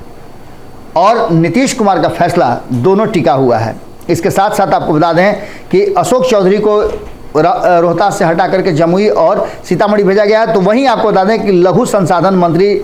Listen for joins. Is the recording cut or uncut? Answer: uncut